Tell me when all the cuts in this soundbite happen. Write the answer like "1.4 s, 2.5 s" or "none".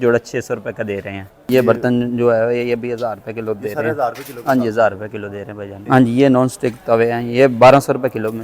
1.5 s, 5.8 s

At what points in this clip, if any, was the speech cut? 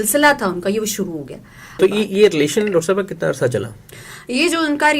1.8 s

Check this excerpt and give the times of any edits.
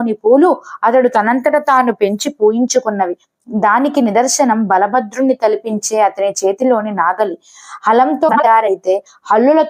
8.3 s

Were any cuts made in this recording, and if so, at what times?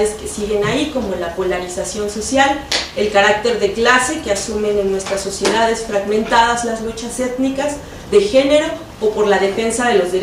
4.1 s

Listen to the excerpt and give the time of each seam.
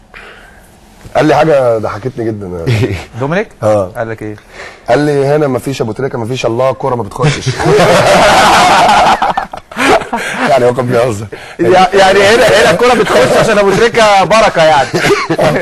8.8 s

